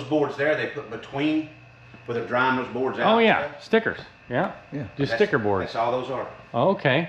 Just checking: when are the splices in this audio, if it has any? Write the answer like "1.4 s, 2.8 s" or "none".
none